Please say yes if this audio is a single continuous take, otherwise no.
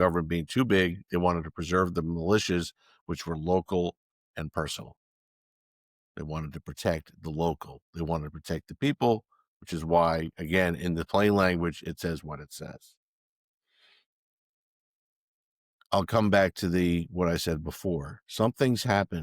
yes